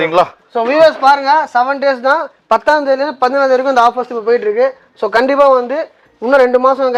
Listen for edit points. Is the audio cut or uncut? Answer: uncut